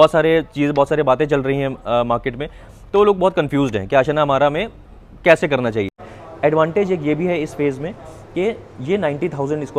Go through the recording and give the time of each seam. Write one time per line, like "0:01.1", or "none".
0:06.0